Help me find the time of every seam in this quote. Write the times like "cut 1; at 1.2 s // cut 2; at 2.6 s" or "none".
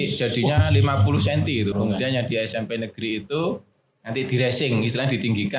cut 1; at 1.7 s